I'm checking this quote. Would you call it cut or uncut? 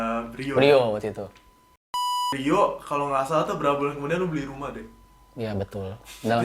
cut